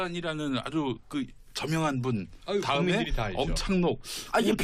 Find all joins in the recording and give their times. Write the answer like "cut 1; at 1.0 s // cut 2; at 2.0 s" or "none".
cut 1; at 3.3 s